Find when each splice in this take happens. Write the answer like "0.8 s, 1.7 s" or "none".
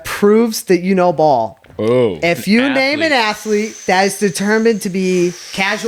none